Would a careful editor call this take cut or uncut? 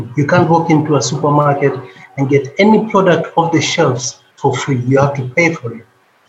uncut